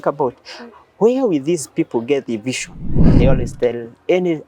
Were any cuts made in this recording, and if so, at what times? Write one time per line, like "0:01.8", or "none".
0:03.2